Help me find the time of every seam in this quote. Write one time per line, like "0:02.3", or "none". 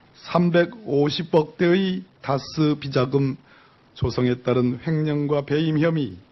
0:03.1